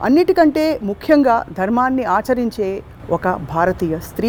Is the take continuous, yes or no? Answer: yes